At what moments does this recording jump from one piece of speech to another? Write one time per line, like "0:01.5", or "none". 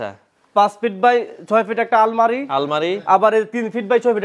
none